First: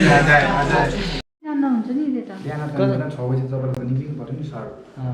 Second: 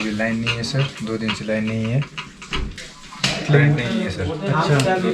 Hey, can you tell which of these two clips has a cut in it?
first; 1 cut; at 1.3 s

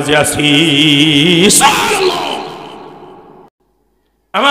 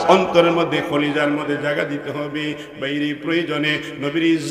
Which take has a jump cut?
first; 1 cut; at 3.5 s

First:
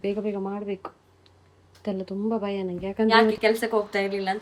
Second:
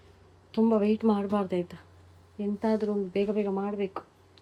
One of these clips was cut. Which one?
first; 1 cut; at 3.3 s

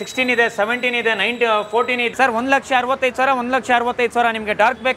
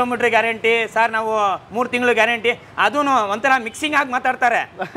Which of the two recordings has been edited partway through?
first; 1 cut; at 2.1 s

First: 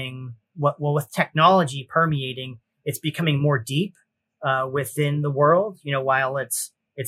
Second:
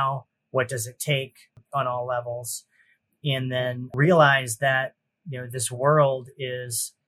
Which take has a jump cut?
second; 2 cuts; at 1.6 s, 3.9 s

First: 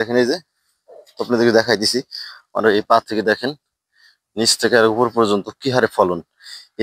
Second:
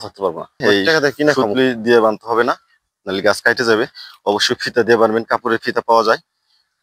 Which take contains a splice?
second; 1 cut; at 1.4 s

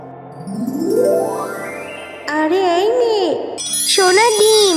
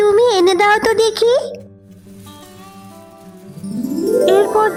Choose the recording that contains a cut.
first; 1 cut; at 3.6 s

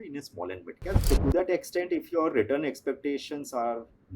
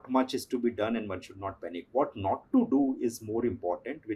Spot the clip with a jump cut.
first; 1 cut; at 1.0 s

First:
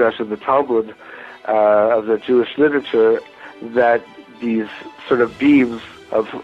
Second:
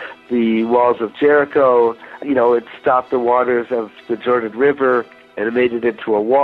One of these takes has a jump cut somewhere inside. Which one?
second; 2 cuts; at 2.2 s, 5.2 s

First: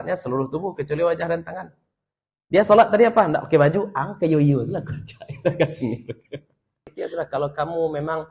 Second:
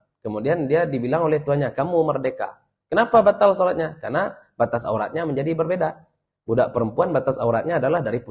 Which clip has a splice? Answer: first; 1 cut; at 7.0 s

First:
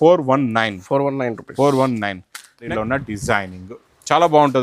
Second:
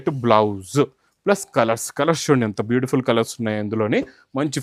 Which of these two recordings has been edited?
first; 1 cut; at 2.6 s

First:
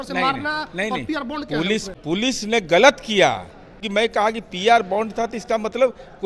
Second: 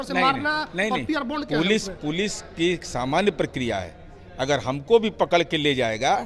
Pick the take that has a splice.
first; 2 cuts; at 1.9 s, 3.8 s

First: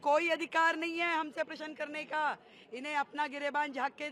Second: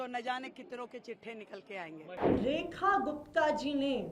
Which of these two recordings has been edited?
second; 1 cut; at 2.1 s

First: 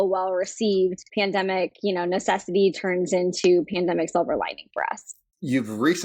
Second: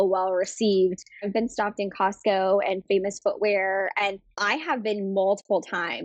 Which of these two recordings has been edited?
second; 2 cuts; at 1.1 s, 4.4 s

